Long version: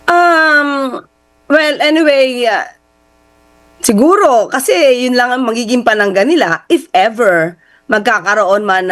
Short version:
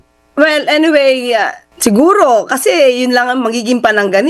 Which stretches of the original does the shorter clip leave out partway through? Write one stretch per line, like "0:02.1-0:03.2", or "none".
0:02.7-0:03.6